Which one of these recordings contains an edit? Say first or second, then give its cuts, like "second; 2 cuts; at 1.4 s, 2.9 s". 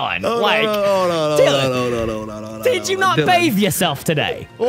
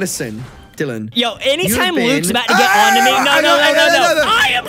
second; 1 cut; at 1.0 s